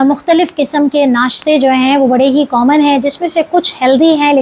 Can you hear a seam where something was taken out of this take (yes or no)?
no